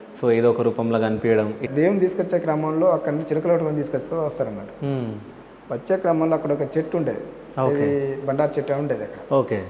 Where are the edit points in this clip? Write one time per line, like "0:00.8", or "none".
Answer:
0:01.7